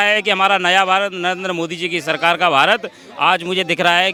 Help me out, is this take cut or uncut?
uncut